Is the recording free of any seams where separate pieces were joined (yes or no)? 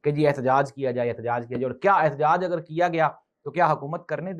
yes